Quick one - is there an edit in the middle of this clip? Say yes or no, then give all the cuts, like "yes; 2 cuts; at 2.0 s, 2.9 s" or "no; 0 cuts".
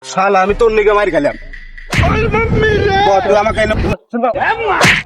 yes; 1 cut; at 3.7 s